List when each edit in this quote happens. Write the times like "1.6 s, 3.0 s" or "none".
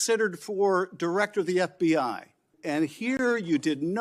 2.5 s